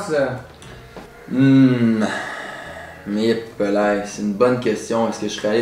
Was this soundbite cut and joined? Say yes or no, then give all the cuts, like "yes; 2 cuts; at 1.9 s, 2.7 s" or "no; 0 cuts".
no; 0 cuts